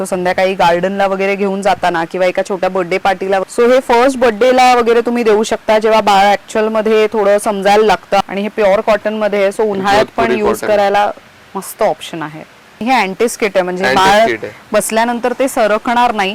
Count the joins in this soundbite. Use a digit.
3